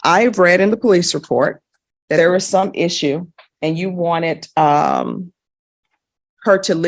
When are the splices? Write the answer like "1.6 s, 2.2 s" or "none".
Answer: 2.2 s